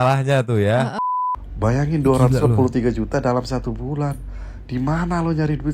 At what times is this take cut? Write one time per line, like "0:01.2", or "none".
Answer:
0:01.0